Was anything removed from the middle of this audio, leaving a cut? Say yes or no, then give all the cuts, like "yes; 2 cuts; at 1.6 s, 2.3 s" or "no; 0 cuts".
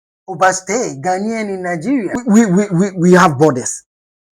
yes; 1 cut; at 2.1 s